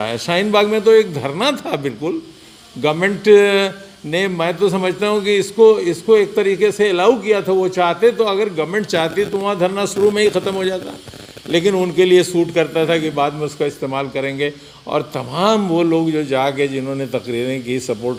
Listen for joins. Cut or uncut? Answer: uncut